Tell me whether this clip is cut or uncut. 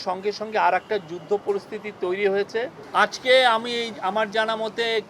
cut